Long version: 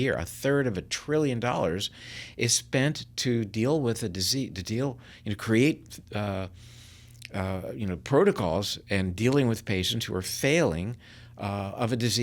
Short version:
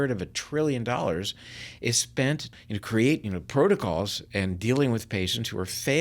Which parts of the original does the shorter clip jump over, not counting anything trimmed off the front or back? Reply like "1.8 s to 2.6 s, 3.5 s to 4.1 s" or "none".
3.1 s to 5.1 s, 5.8 s to 7.8 s

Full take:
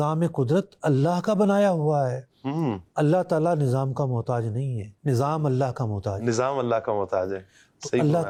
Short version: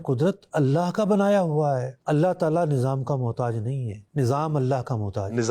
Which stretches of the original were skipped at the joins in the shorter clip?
2.3 s to 2.9 s

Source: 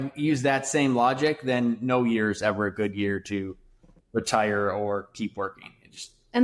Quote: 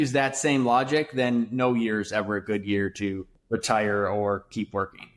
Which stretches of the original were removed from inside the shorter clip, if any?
3.6 s to 3.9 s

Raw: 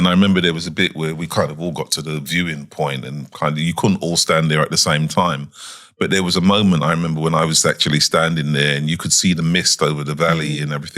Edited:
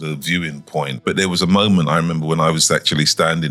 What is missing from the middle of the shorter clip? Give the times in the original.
3.0 s to 5.9 s

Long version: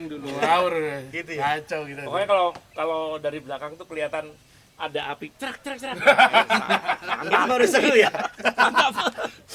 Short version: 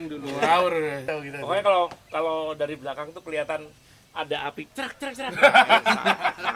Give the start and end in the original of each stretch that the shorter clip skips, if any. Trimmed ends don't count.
1.1 s to 1.7 s

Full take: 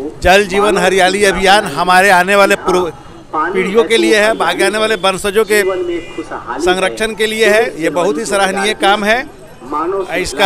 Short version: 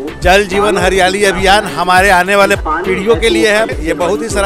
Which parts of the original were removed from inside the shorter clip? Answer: 2.6 s to 3.3 s, 4.4 s to 7.7 s

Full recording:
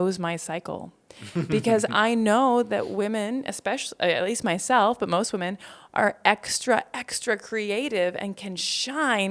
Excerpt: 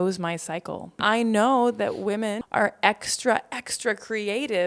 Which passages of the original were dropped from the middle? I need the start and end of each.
1.0 s to 1.9 s, 3.3 s to 5.8 s

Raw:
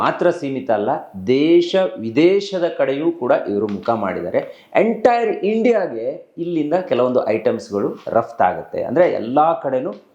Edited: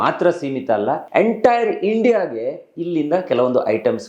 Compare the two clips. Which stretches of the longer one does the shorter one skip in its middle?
1.0 s to 4.6 s

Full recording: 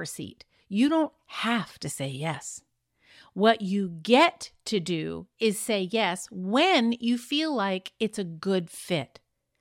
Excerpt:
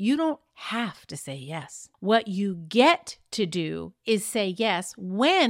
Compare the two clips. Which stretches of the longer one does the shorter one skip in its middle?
2.5 s to 3.1 s

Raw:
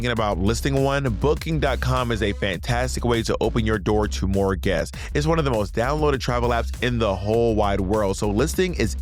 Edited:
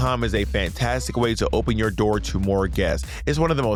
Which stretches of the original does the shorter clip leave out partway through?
none

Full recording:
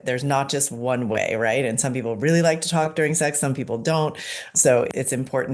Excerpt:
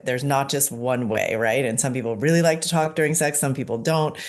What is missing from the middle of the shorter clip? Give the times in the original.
none

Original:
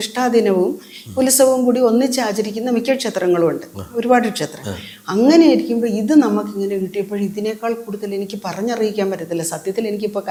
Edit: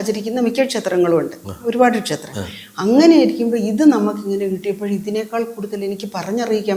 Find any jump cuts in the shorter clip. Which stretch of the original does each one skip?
none

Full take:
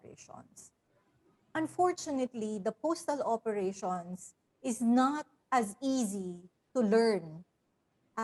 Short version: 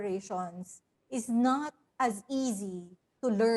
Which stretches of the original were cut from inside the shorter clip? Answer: none

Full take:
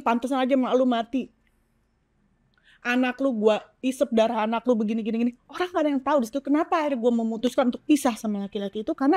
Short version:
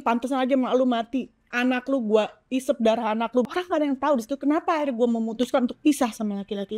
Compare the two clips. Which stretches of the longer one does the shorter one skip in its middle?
1.4 s to 2.7 s, 4.8 s to 5.5 s

